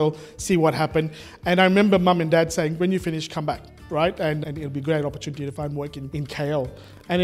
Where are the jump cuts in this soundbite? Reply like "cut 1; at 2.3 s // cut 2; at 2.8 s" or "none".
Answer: cut 1; at 4.4 s